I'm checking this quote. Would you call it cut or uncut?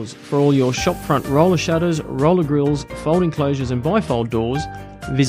uncut